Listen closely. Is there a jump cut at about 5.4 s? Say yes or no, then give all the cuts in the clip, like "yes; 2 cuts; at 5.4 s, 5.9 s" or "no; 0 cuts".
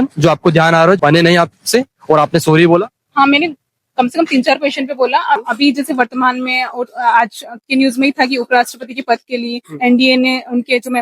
yes; 2 cuts; at 1.0 s, 5.4 s